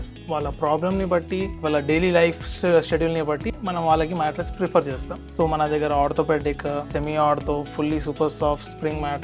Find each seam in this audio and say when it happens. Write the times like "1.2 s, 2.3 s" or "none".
1.6 s, 5.1 s, 6.9 s